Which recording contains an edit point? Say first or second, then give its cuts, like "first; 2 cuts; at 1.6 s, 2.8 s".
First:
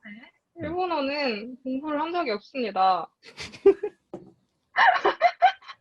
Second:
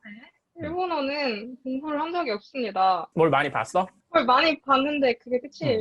second; 1 cut; at 3.1 s